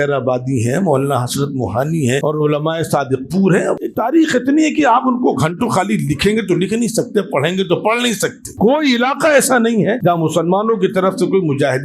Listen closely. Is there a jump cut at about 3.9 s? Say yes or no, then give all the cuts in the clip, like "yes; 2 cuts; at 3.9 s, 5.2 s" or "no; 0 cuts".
yes; 4 cuts; at 2.2 s, 3.9 s, 8.4 s, 10.0 s